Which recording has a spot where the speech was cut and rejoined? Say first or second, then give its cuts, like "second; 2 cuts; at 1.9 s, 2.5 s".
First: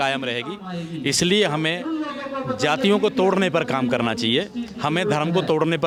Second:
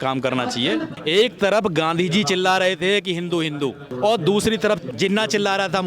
second; 3 cuts; at 0.9 s, 3.9 s, 4.9 s